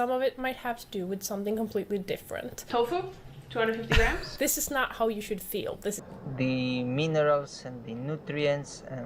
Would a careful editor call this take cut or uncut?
cut